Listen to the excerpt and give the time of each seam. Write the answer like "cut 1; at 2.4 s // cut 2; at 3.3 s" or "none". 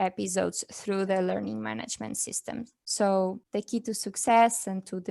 cut 1; at 2.8 s // cut 2; at 3.4 s